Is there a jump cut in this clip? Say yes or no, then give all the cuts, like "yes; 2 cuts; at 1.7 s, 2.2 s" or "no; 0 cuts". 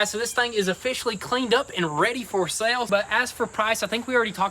yes; 1 cut; at 2.9 s